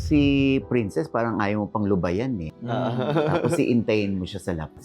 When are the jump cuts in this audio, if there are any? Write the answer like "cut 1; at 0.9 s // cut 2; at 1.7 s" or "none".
cut 1; at 2.5 s